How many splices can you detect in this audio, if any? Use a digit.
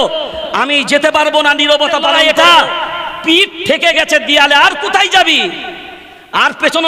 1